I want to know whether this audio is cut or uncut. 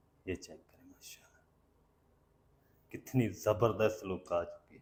uncut